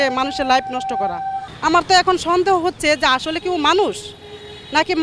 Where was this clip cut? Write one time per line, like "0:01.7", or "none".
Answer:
0:01.3